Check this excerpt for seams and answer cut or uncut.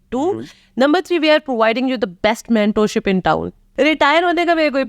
cut